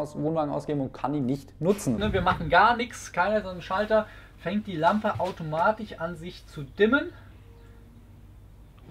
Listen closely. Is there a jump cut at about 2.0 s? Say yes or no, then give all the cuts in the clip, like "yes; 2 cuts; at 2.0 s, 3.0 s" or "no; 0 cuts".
yes; 1 cut; at 2.0 s